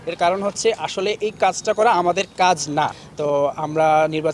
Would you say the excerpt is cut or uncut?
cut